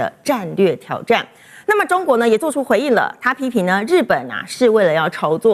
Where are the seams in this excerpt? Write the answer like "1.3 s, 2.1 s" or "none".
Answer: none